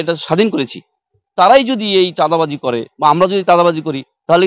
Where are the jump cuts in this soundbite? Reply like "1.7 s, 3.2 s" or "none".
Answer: none